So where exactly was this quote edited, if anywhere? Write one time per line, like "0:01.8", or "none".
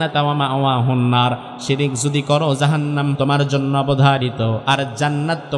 0:03.1